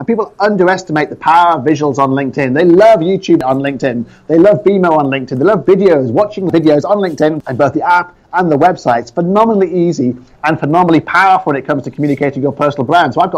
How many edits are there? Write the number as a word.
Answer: three